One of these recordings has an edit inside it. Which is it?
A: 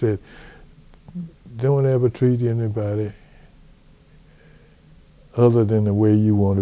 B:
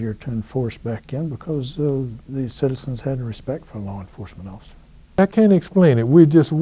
B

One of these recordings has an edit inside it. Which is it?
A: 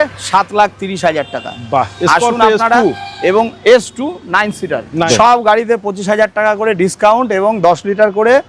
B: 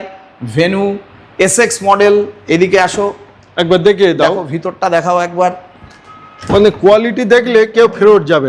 A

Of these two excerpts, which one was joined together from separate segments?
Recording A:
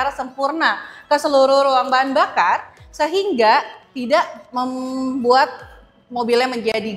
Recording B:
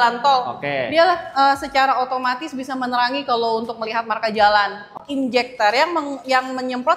B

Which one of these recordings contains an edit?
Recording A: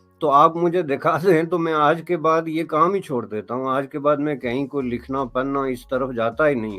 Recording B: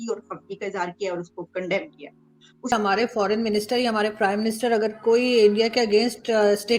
B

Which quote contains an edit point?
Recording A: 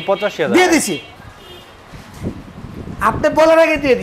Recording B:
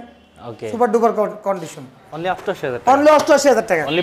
B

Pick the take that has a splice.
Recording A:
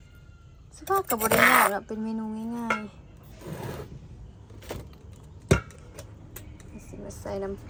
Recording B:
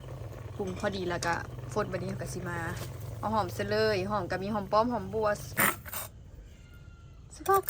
B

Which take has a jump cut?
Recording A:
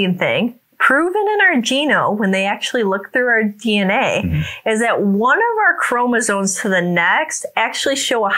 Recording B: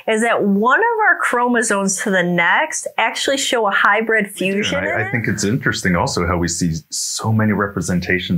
B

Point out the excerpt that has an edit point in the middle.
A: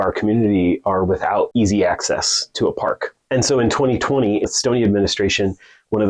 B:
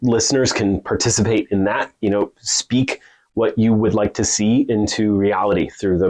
A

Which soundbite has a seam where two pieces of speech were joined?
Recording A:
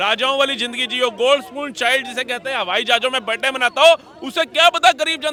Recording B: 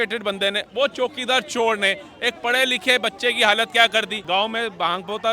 B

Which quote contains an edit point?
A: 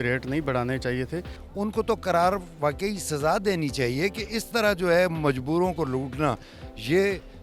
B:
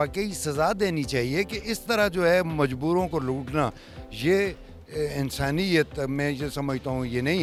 A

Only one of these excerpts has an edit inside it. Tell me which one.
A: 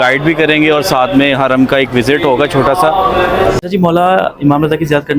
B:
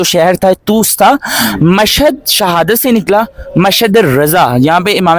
A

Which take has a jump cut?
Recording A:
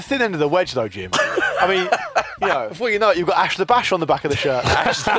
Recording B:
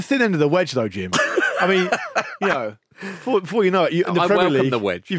A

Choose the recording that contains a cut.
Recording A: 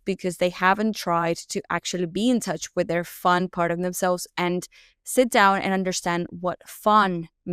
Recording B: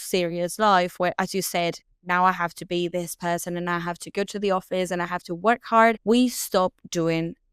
B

